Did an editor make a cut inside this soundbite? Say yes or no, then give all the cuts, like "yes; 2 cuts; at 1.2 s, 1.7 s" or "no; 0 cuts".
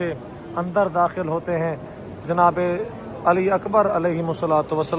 no; 0 cuts